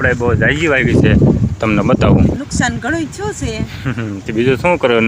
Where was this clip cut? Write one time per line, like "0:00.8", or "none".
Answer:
0:02.3

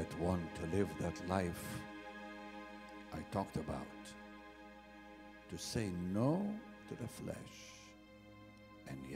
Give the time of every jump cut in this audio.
none

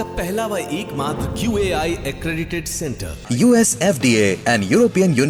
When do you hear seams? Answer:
none

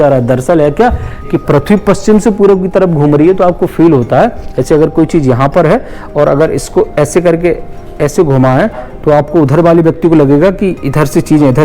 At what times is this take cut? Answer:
none

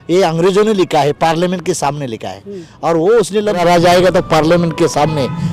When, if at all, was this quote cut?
0:03.6

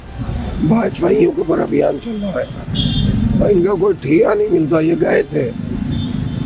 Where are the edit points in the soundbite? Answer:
none

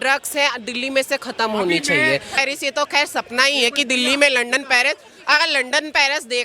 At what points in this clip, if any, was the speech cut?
0:02.4

